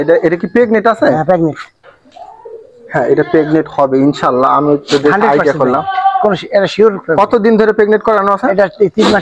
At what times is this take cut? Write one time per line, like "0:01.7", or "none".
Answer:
none